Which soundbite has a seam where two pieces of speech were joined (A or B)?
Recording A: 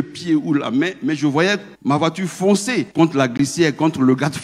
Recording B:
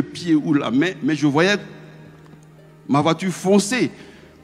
A